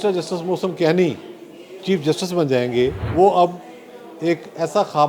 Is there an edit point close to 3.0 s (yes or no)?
yes